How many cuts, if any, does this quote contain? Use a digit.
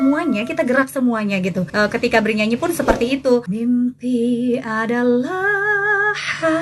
2